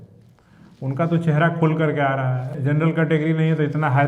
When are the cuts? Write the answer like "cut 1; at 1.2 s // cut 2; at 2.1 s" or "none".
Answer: cut 1; at 2.5 s